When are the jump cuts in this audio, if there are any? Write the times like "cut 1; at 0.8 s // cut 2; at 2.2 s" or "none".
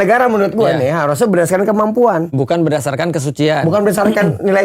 none

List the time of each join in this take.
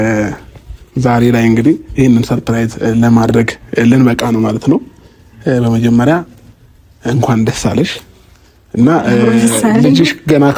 none

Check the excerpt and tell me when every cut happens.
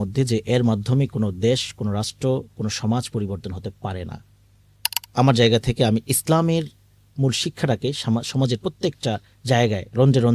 cut 1; at 5.0 s

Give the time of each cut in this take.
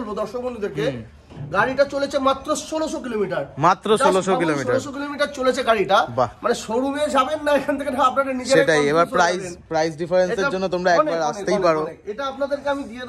none

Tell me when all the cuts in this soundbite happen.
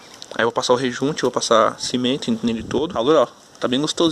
cut 1; at 2.9 s

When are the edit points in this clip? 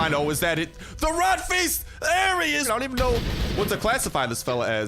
cut 1; at 2.7 s

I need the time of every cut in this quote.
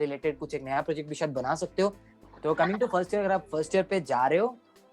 cut 1; at 2.1 s

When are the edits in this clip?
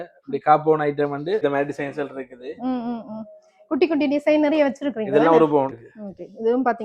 cut 1; at 1.4 s // cut 2; at 5.8 s

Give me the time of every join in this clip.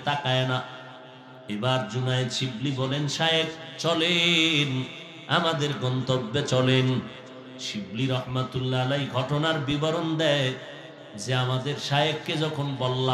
none

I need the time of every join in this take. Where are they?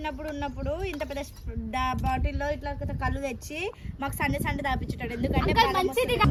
none

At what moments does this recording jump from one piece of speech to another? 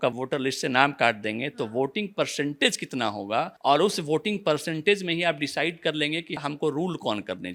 none

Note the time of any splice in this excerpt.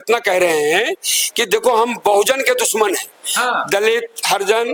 none

